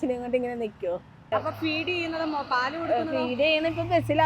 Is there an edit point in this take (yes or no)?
yes